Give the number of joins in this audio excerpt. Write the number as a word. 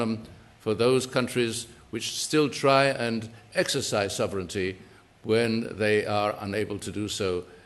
one